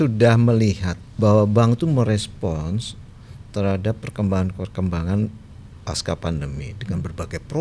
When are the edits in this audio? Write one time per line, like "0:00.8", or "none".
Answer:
0:01.0

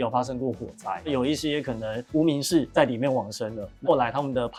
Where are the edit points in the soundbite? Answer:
none

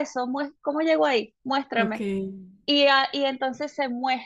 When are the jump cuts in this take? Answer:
none

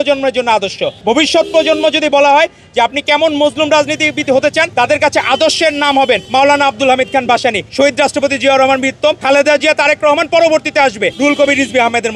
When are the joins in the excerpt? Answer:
0:00.9
0:04.7
0:06.2
0:07.6
0:09.2
0:11.1

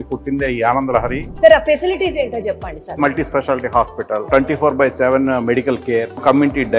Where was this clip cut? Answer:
0:01.2
0:03.0
0:04.2

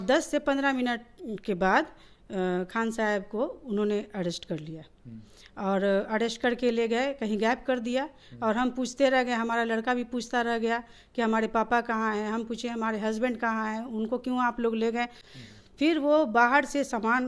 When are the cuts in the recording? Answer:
0:15.2

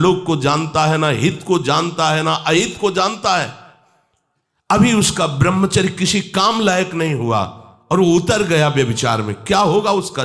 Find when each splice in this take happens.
none

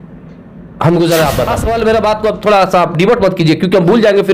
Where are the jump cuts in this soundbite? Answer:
0:01.6

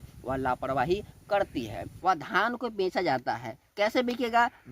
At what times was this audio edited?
0:01.9

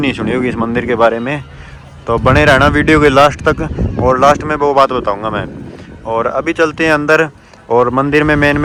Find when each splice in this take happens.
none

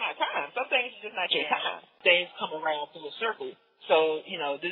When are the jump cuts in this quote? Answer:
0:02.0

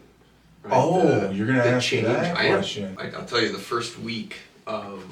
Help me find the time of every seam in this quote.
0:03.0

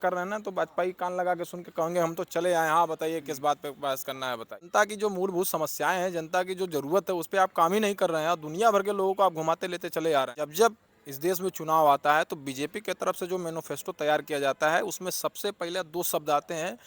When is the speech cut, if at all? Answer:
0:04.7
0:10.4

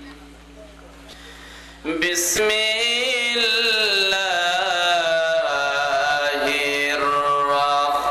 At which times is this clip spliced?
0:01.1
0:02.4

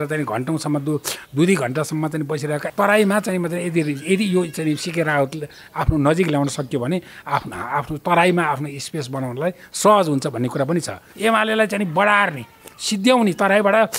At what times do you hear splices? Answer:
0:02.7
0:11.0

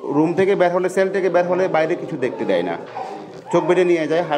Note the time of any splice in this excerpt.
none

